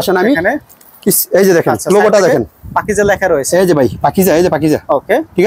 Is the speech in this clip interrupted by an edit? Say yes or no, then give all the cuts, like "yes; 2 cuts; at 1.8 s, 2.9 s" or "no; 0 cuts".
no; 0 cuts